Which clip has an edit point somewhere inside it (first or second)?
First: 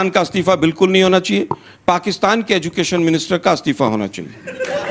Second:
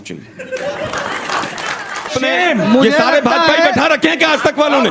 second